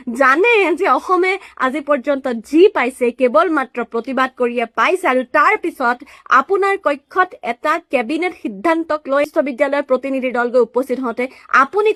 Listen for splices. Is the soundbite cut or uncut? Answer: uncut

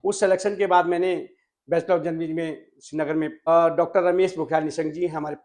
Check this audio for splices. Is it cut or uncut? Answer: cut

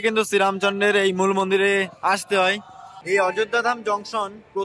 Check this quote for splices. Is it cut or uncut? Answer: cut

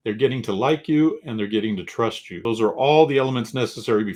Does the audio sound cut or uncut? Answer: uncut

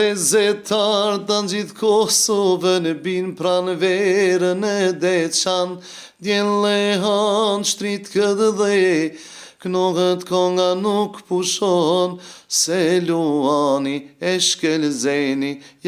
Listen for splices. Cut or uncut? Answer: uncut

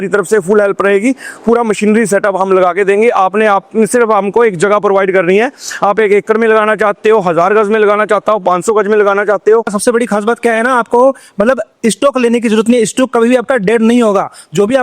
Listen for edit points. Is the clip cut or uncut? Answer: cut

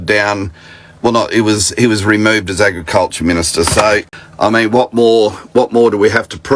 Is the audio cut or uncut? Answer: cut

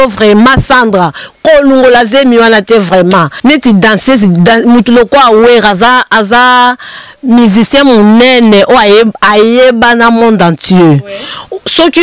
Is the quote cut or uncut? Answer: cut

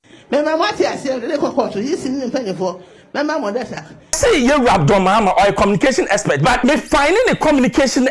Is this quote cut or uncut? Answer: cut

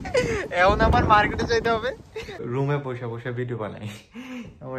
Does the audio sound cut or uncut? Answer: cut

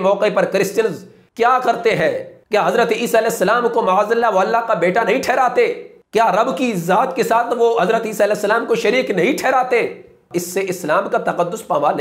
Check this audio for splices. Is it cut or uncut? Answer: cut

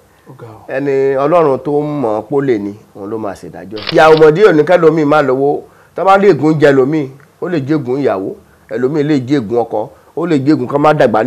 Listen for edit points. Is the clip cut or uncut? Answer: cut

